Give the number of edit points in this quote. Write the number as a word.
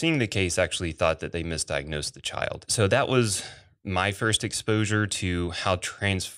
one